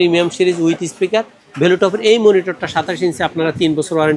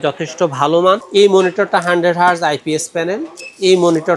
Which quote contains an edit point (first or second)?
second